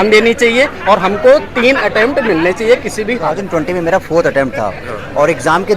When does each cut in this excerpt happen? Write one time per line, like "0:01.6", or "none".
0:03.4

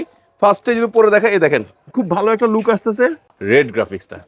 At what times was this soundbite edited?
0:03.3

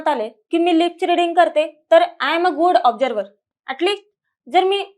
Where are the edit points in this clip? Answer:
none

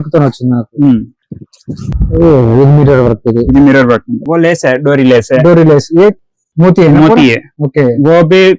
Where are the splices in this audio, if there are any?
0:04.2

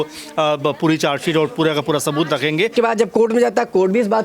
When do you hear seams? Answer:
0:02.7

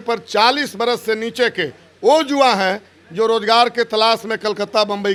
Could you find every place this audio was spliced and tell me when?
none

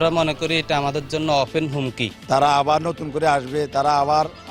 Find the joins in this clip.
0:02.1

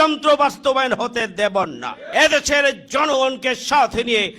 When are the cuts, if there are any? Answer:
0:01.9

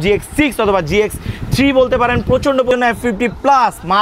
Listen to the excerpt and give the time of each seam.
0:02.7

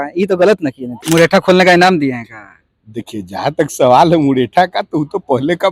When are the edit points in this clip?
0:01.0

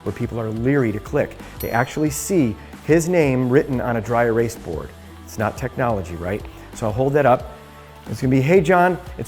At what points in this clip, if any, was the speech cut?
none

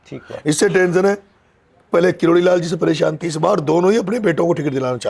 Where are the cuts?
0:03.3

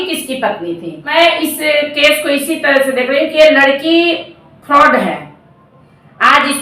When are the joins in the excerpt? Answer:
0:01.1

